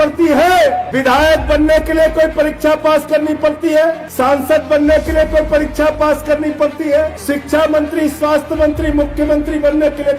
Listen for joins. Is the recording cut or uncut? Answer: cut